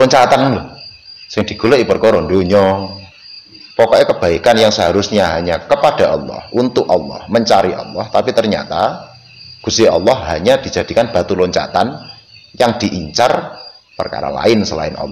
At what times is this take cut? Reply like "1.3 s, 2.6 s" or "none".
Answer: 3.6 s